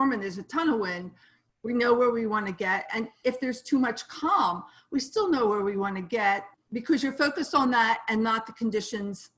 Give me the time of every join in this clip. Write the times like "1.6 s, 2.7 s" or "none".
6.5 s